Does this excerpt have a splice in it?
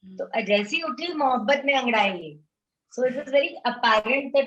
no; 0 cuts

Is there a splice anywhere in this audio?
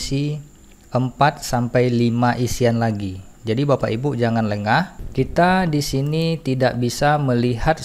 yes; 1 cut; at 5.0 s

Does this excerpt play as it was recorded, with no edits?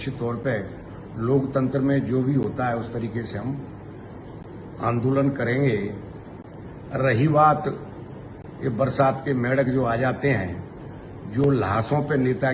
yes; 0 cuts

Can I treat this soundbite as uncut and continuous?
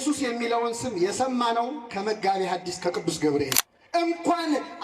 no; 1 cut; at 3.6 s

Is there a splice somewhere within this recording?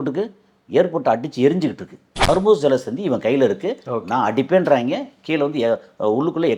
yes; 1 cut; at 2.3 s

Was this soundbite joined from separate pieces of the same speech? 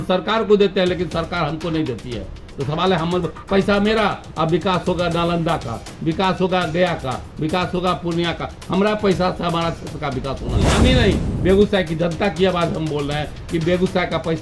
yes; 1 cut; at 10.7 s

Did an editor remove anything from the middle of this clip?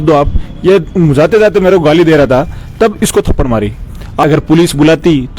yes; 1 cut; at 4.2 s

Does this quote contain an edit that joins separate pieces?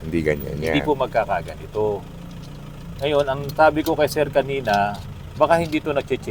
no; 0 cuts

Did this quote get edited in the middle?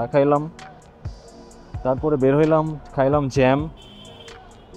no; 0 cuts

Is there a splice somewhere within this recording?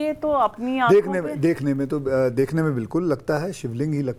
no; 0 cuts

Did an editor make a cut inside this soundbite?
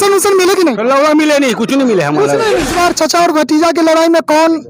yes; 1 cut; at 2.7 s

